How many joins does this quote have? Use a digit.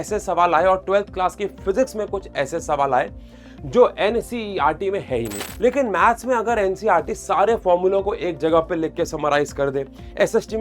1